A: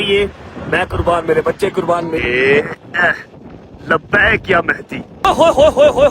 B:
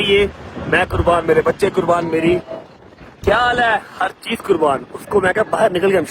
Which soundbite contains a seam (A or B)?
A